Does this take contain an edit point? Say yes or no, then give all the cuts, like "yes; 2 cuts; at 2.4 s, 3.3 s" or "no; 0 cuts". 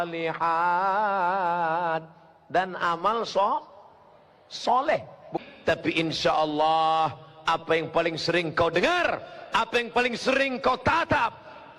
yes; 1 cut; at 5.3 s